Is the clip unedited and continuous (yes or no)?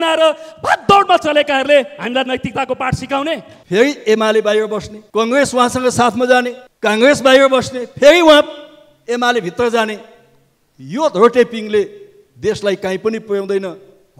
no